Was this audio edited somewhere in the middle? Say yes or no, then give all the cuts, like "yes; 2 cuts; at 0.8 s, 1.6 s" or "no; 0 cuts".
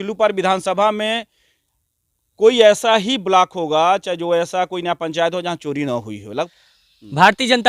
yes; 1 cut; at 6.5 s